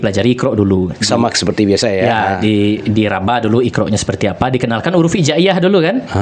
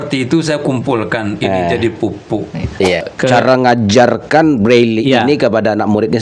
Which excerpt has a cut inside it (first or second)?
second